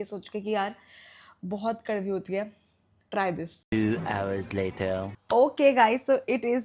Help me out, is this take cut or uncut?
uncut